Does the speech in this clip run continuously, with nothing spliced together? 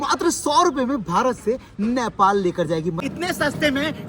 no; 1 cut; at 3.0 s

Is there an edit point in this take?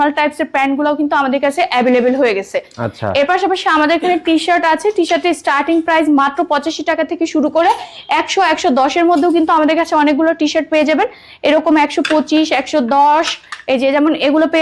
no; 0 cuts

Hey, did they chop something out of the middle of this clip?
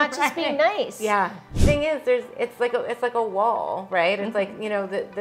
yes; 1 cut; at 1.5 s

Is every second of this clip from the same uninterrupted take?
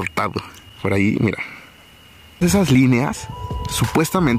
no; 1 cut; at 2.4 s

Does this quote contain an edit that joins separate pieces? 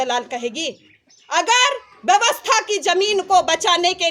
no; 0 cuts

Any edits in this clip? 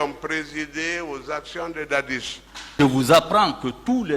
yes; 1 cut; at 2.8 s

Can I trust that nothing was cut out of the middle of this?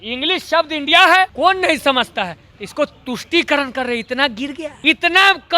no; 2 cuts; at 1.3 s, 4.7 s

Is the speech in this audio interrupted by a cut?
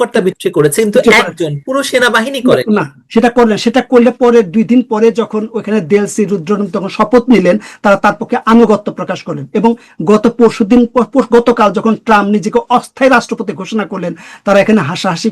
no; 0 cuts

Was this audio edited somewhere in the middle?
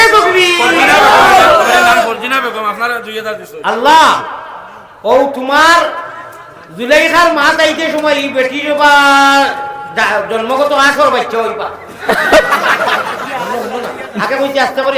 no; 0 cuts

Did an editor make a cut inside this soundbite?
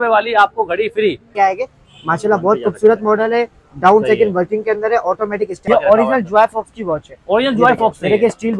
yes; 2 cuts; at 1.3 s, 5.6 s

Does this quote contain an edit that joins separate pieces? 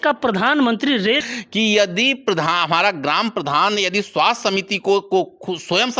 yes; 1 cut; at 1.2 s

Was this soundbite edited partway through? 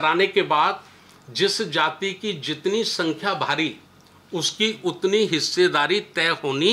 no; 0 cuts

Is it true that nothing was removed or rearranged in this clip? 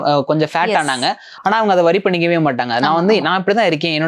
yes; 0 cuts

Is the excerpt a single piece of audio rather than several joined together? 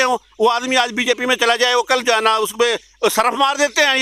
yes; 0 cuts

